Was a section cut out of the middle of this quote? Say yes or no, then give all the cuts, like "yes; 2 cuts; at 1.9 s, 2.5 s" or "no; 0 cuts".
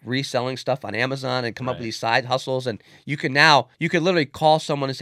yes; 1 cut; at 3.8 s